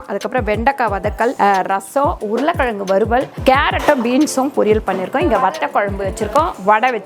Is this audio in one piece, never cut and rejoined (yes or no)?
no